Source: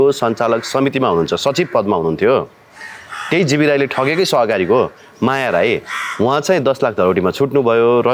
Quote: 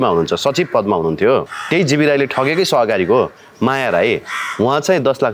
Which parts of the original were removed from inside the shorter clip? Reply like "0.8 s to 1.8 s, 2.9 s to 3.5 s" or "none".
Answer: 2.6 s to 3.2 s